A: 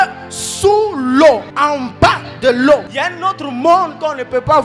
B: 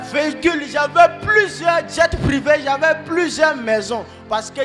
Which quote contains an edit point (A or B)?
A